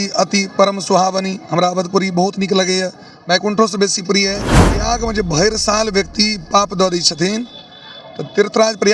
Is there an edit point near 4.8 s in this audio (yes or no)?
yes